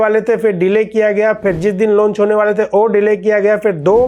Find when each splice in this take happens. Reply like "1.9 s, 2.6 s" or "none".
none